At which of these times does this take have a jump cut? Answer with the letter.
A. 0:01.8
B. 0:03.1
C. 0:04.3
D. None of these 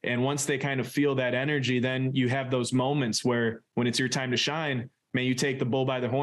D